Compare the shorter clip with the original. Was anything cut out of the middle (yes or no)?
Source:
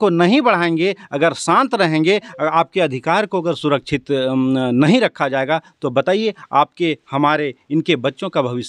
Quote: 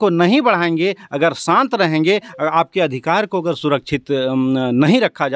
no